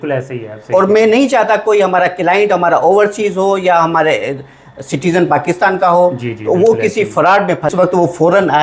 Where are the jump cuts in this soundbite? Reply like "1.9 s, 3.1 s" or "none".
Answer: 7.7 s